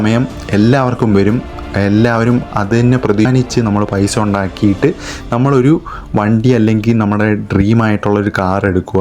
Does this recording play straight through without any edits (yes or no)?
no